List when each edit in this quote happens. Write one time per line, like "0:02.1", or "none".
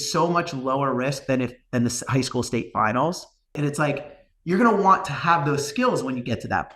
0:03.5